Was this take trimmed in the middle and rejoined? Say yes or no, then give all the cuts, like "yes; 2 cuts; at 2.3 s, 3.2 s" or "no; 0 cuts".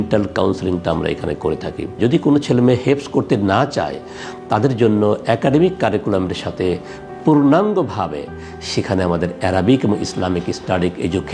yes; 1 cut; at 2.0 s